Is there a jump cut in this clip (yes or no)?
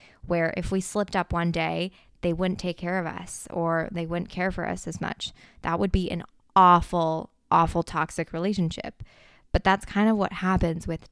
no